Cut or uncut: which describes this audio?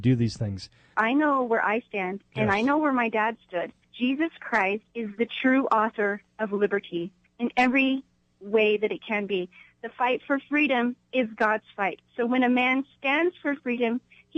cut